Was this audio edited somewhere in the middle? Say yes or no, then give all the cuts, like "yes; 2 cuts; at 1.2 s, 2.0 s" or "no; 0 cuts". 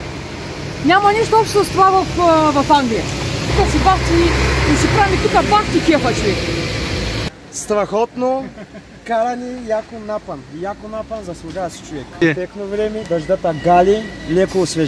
yes; 2 cuts; at 7.0 s, 12.2 s